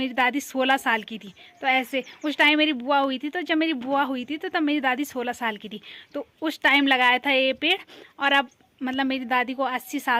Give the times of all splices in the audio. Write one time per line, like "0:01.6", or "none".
none